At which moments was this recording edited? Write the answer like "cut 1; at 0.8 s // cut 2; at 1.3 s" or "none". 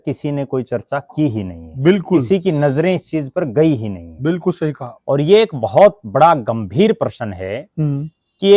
none